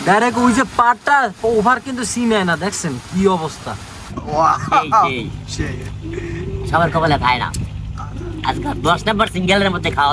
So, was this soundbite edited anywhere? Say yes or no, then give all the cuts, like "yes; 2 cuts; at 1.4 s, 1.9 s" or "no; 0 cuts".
yes; 1 cut; at 4.1 s